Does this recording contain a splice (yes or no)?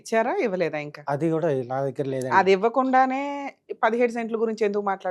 no